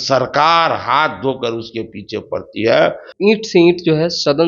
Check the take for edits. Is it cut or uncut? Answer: cut